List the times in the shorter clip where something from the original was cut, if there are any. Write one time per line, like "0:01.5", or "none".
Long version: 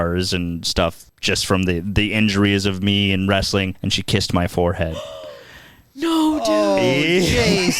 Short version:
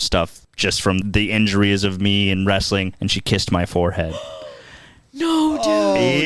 0:01.0